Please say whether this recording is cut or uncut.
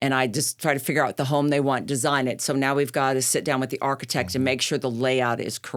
uncut